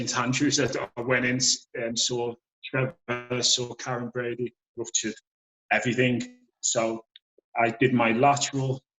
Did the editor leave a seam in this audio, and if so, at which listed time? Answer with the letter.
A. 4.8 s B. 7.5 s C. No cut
A